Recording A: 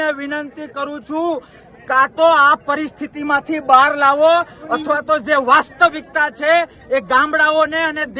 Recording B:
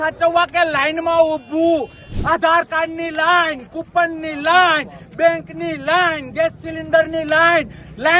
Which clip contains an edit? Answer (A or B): B